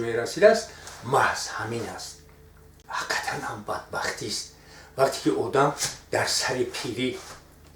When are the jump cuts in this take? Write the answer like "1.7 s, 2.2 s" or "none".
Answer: 2.8 s